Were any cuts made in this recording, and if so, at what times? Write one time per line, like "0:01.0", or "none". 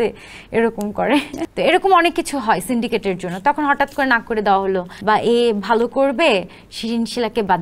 0:01.4
0:04.9

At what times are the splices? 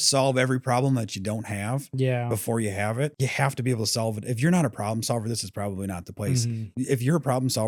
none

